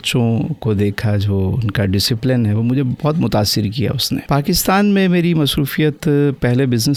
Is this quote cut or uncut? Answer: uncut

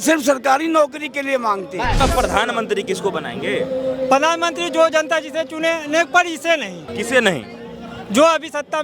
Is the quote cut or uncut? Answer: cut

